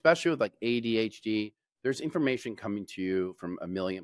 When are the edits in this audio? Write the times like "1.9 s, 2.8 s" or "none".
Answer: none